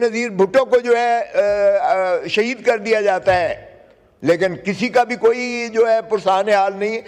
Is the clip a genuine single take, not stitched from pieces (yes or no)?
yes